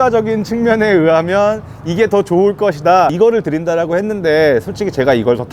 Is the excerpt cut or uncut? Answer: cut